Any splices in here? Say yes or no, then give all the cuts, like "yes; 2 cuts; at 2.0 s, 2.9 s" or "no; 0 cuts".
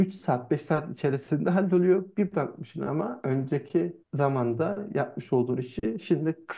no; 0 cuts